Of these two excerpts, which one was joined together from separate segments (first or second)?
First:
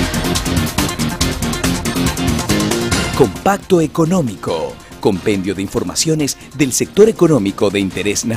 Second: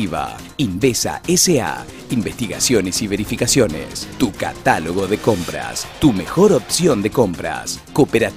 first